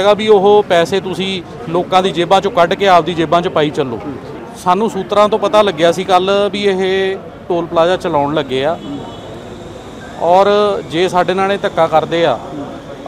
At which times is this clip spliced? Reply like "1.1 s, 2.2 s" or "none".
4.3 s